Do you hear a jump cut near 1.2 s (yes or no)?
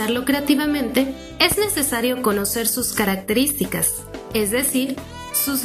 no